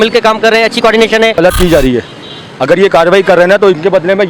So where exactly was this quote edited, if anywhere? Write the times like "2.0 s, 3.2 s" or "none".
1.3 s